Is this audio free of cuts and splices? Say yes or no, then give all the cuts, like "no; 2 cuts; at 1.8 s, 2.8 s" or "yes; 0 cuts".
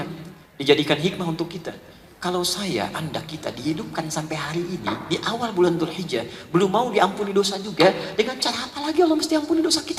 yes; 0 cuts